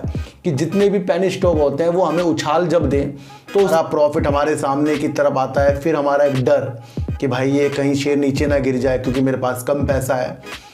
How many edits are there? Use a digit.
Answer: 1